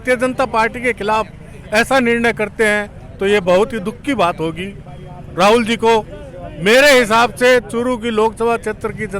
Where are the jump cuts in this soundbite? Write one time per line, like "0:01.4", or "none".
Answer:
none